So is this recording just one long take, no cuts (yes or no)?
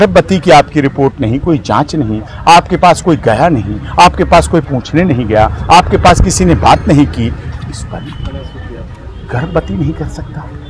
yes